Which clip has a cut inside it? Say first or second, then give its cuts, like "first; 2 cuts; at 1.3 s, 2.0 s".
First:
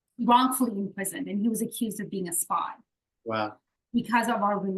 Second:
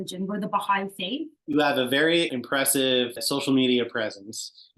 second; 1 cut; at 1.4 s